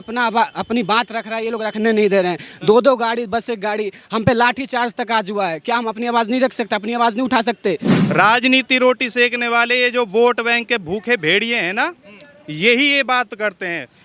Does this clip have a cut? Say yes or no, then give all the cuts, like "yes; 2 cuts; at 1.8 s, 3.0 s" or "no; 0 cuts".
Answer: yes; 1 cut; at 7.9 s